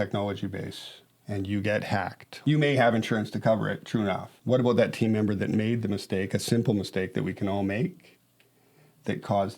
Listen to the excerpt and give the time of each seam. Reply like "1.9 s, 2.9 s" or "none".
2.2 s, 4.3 s

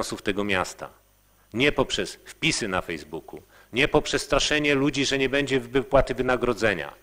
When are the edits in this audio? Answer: none

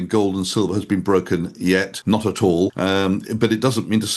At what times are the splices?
1.9 s, 2.7 s

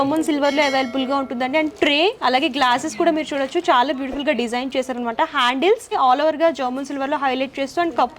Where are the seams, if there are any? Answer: none

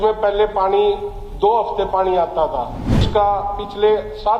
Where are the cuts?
3.1 s

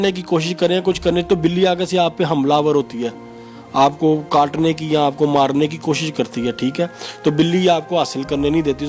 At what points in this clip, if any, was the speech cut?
none

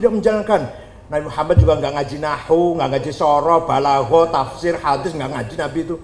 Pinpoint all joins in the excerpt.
none

